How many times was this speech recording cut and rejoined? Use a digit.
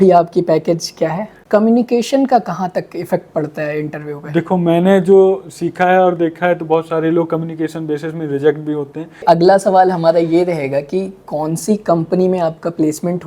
2